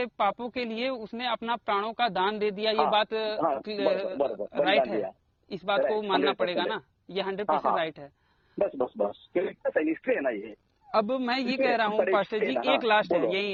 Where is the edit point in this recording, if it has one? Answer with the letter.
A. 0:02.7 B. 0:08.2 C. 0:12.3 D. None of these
D